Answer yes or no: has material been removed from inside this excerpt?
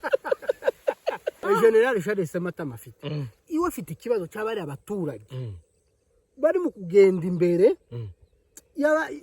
yes